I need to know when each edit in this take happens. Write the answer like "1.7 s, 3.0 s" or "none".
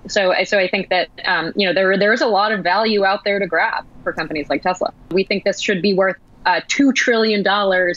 5.1 s